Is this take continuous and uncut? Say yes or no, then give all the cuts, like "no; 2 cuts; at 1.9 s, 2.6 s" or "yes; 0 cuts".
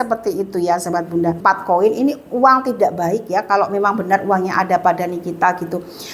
no; 1 cut; at 1.4 s